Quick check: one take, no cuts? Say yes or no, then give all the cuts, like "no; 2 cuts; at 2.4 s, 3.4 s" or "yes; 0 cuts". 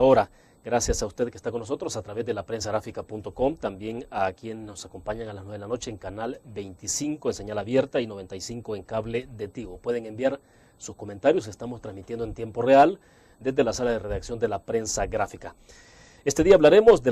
no; 1 cut; at 15.1 s